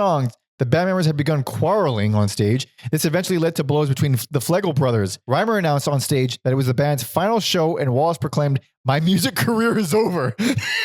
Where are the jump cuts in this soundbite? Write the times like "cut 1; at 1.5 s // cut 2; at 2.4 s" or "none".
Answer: cut 1; at 5.2 s // cut 2; at 6.4 s